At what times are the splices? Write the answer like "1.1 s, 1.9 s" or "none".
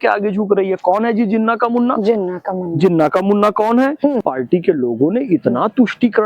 4.2 s